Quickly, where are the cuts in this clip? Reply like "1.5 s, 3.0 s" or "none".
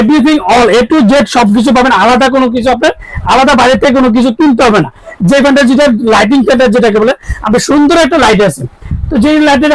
none